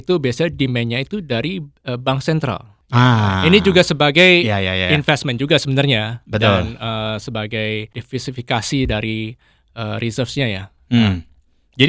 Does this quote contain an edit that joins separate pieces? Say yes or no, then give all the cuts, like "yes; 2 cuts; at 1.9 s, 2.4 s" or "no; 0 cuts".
yes; 3 cuts; at 1.7 s, 2.7 s, 8.0 s